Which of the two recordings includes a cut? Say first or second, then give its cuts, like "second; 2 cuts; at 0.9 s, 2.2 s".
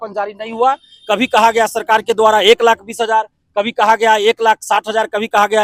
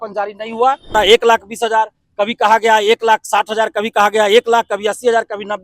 second; 1 cut; at 0.9 s